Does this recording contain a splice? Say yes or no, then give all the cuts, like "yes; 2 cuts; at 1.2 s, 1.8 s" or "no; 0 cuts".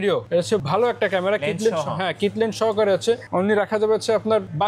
no; 0 cuts